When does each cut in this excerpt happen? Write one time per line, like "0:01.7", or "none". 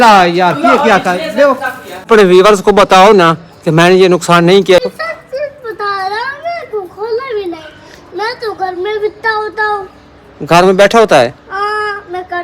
0:02.1
0:04.8